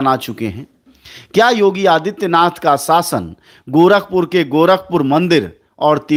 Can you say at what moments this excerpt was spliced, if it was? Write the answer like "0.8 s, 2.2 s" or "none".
none